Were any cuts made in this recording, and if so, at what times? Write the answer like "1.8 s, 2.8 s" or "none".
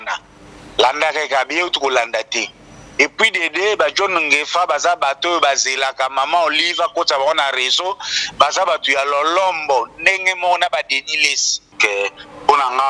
11.7 s